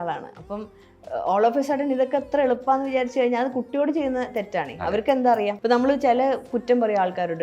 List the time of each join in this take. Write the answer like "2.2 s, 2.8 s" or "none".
5.6 s